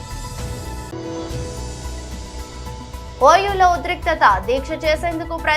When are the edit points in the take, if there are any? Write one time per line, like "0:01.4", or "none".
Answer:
0:00.9
0:03.2